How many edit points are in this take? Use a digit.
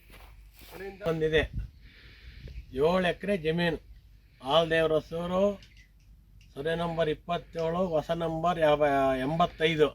1